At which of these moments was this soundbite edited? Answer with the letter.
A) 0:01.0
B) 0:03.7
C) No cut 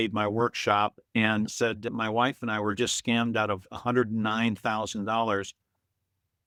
C